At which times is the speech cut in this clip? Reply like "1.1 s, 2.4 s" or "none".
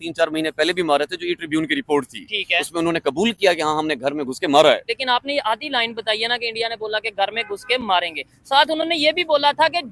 4.9 s